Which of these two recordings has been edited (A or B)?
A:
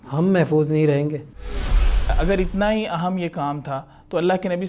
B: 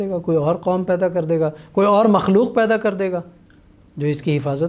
A